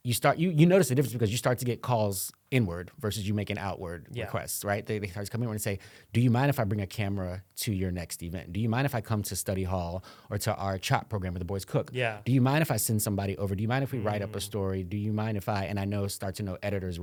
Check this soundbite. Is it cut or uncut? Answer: uncut